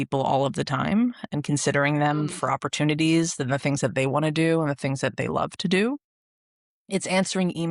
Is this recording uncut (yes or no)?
yes